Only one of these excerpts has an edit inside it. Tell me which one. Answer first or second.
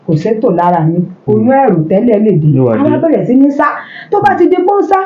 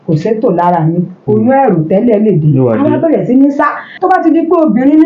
second